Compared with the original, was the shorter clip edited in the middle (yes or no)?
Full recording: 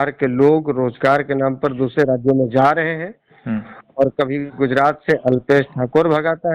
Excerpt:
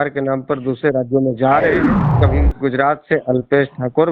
yes